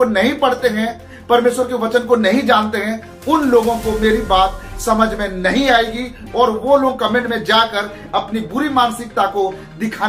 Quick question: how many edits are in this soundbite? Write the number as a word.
zero